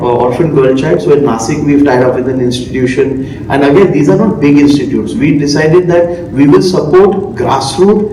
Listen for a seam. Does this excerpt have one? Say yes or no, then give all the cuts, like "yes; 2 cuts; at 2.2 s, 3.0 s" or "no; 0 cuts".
no; 0 cuts